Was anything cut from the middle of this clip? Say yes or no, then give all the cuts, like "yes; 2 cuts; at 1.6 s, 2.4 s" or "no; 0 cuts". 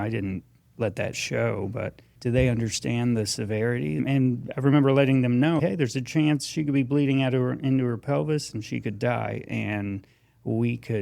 yes; 3 cuts; at 2.1 s, 4.0 s, 5.6 s